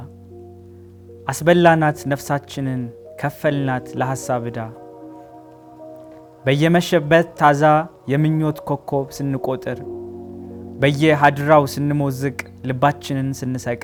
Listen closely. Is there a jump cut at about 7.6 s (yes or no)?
no